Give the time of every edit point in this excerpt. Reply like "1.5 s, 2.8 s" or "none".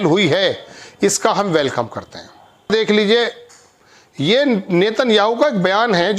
2.7 s